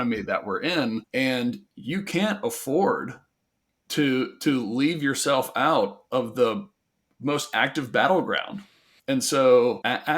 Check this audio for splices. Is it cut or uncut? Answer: cut